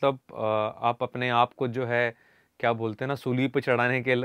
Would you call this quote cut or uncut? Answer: uncut